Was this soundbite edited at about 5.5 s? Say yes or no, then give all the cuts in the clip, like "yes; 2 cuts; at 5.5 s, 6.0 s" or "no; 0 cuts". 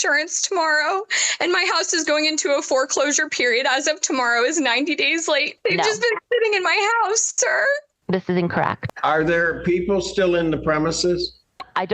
yes; 2 cuts; at 5.5 s, 8.8 s